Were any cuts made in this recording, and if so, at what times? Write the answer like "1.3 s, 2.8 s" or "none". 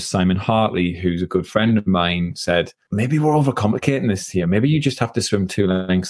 2.8 s